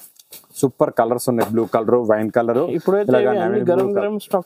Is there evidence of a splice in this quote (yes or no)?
no